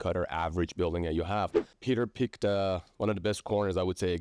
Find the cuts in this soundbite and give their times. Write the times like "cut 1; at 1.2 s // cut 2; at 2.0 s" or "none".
cut 1; at 1.7 s